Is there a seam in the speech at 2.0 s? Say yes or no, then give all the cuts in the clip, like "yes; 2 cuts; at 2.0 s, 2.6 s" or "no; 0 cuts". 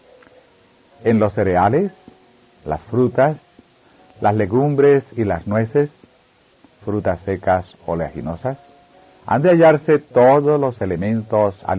no; 1 cut; at 10.6 s